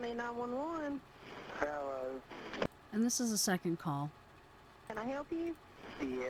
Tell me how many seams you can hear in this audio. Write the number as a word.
zero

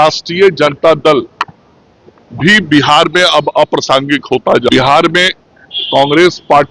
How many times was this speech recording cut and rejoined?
one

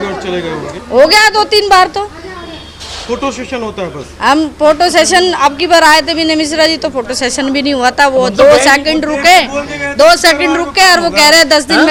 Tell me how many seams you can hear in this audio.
zero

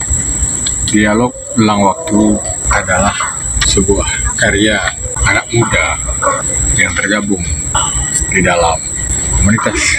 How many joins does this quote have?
five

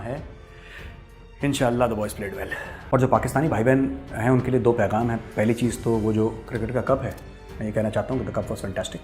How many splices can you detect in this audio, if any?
one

